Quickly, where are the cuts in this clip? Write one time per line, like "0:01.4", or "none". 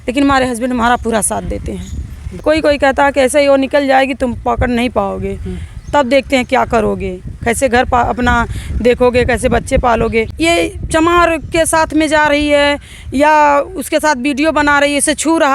0:02.4
0:10.3